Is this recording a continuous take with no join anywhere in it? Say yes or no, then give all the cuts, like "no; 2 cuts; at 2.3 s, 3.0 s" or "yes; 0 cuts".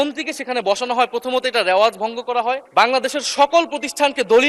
no; 1 cut; at 2.6 s